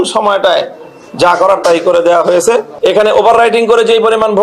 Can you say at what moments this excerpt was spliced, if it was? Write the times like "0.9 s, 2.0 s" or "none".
2.7 s